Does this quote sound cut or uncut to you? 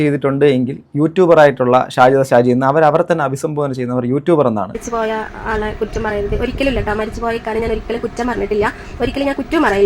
cut